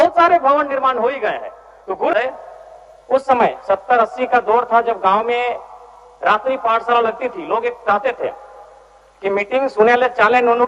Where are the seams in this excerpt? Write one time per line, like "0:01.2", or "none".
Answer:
0:02.1

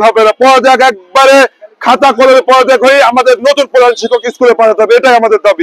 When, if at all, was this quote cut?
none

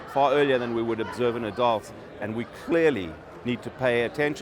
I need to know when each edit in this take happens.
0:02.0

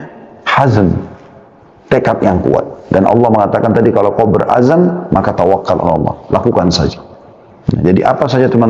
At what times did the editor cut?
none

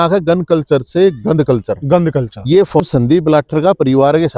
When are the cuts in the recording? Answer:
0:02.8

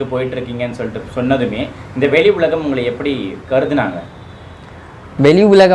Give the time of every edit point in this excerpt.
none

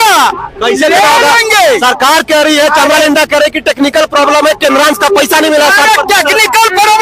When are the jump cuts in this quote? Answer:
none

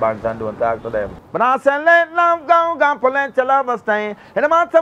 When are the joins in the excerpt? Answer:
0:01.2

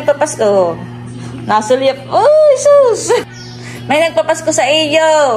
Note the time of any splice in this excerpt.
0:03.2

